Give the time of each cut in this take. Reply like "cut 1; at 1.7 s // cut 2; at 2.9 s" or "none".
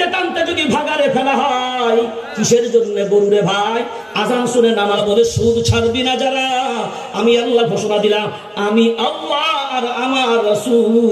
cut 1; at 5.0 s